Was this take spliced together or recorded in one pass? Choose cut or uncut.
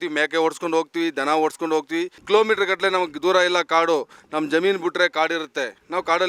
cut